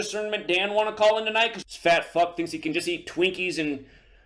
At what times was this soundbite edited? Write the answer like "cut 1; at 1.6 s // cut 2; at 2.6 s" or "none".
cut 1; at 1.6 s